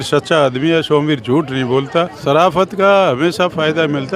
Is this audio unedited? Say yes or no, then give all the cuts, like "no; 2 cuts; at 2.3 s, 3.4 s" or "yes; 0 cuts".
no; 1 cut; at 2.1 s